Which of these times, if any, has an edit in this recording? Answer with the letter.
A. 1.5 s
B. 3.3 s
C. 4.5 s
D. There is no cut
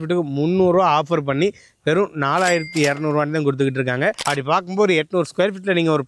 D